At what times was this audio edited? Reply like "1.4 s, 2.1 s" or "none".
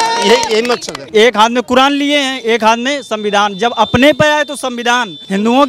1.0 s